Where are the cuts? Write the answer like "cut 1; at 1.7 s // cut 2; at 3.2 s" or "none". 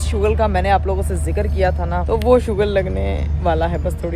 cut 1; at 2.0 s